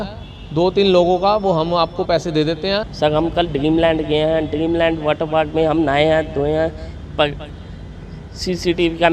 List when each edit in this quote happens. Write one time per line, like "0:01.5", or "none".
0:02.9